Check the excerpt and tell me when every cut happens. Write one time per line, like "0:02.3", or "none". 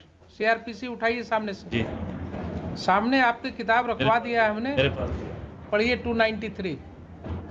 none